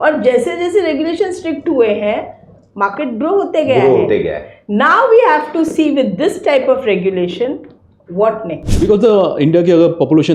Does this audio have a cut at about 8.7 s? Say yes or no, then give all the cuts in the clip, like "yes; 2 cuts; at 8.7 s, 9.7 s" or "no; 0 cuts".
yes; 1 cut; at 8.7 s